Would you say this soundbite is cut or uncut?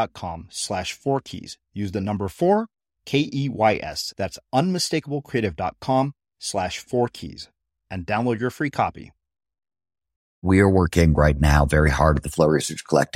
cut